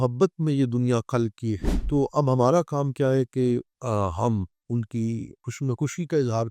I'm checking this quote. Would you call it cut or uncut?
cut